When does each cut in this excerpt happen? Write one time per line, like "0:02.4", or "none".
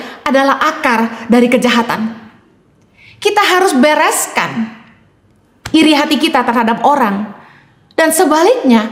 none

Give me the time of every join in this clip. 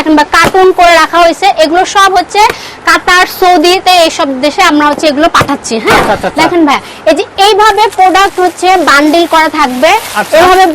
none

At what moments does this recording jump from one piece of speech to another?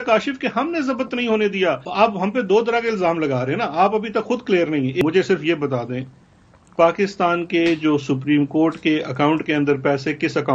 0:01.9
0:05.0

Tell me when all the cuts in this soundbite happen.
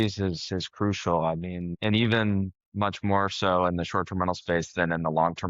0:01.7

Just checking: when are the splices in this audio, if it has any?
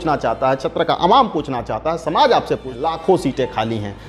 0:02.7

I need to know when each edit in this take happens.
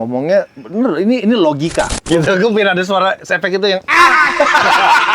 0:02.0

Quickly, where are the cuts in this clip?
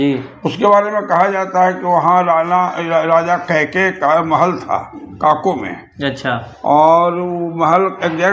none

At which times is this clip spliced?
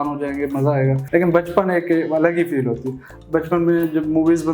0:01.0
0:03.1

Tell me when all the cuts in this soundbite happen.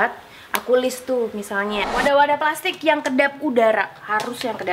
0:01.9

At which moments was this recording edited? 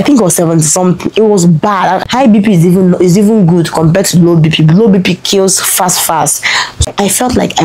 0:02.0
0:06.9

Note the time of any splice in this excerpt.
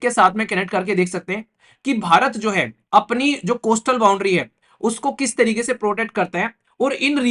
none

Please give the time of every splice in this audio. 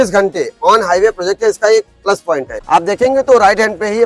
0:02.5

